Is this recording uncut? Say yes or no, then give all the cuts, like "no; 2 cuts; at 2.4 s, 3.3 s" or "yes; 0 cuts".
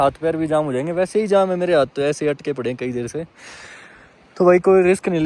yes; 0 cuts